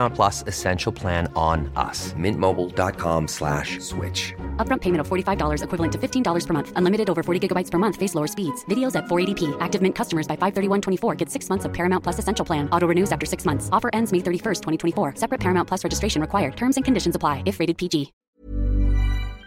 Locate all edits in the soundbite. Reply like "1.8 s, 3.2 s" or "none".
18.2 s